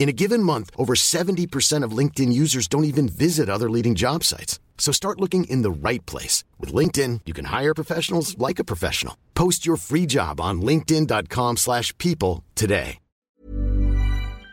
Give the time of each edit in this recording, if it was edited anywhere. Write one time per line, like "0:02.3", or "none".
0:13.3